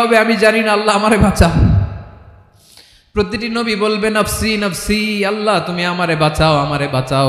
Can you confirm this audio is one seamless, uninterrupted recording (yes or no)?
yes